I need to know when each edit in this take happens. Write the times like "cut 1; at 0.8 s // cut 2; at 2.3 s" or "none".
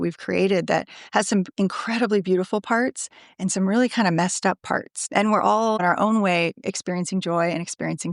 cut 1; at 5.0 s // cut 2; at 5.8 s